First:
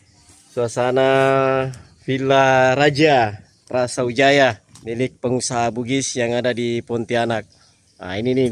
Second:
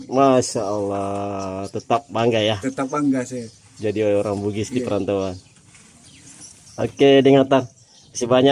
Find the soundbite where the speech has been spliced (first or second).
first